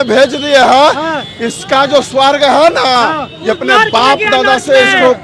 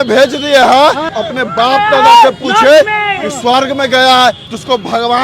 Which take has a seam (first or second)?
second